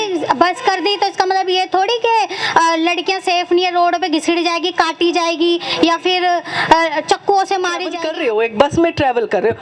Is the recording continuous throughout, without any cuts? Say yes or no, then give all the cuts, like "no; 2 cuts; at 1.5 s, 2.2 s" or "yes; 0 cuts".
no; 1 cut; at 8.0 s